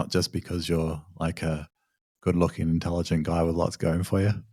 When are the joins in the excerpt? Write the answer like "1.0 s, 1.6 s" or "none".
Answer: none